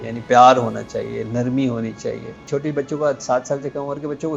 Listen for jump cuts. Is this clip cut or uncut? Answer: cut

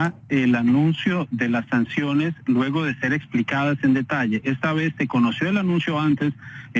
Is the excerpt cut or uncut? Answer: cut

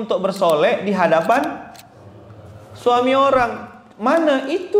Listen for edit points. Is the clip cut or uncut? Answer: uncut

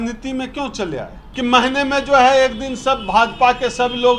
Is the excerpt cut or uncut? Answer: cut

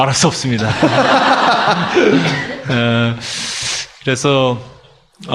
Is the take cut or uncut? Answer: uncut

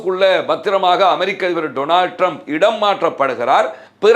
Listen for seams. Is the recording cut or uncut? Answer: uncut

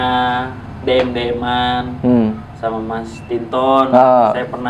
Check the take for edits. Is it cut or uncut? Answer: uncut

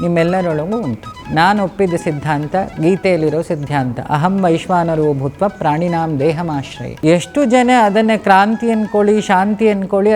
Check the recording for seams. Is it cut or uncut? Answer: cut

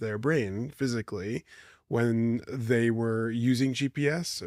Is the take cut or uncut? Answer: uncut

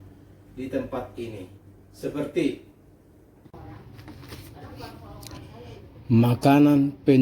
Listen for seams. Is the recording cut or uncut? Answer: cut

